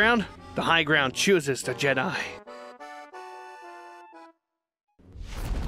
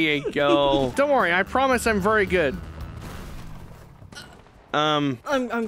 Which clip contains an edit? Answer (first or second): second